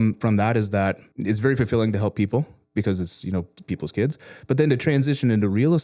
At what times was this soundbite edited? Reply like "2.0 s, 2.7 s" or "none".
1.1 s